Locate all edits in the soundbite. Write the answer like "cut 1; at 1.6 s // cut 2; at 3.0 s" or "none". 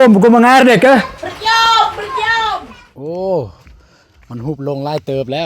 cut 1; at 2.5 s

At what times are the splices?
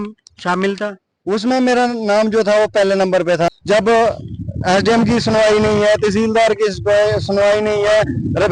cut 1; at 3.5 s

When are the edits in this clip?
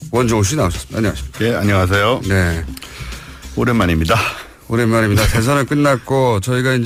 none

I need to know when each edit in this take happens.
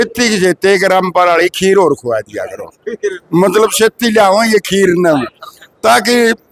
none

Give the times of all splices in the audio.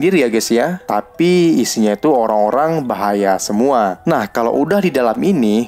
cut 1; at 4.0 s

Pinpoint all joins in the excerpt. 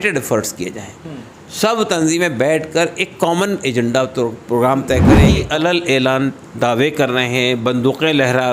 cut 1; at 5.4 s

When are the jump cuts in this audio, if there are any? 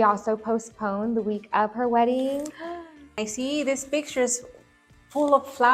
cut 1; at 3.2 s

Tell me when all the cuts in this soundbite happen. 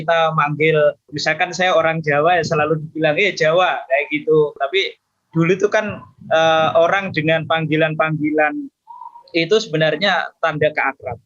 cut 1; at 1.1 s // cut 2; at 4.6 s

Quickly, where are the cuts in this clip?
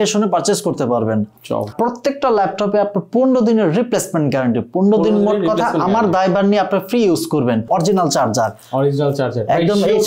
cut 1; at 1.7 s // cut 2; at 7.7 s

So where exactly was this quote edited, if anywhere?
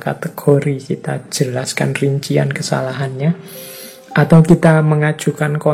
none

